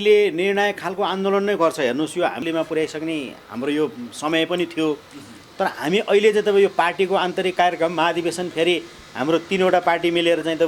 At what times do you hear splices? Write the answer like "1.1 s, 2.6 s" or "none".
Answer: none